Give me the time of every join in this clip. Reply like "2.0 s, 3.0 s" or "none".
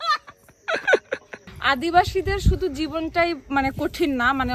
1.5 s